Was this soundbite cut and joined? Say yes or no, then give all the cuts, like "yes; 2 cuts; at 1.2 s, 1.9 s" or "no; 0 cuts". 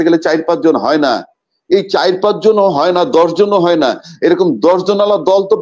no; 0 cuts